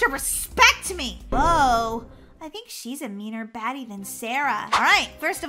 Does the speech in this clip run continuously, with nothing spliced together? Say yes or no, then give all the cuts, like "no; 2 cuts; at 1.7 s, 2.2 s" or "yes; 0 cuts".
no; 2 cuts; at 1.3 s, 4.7 s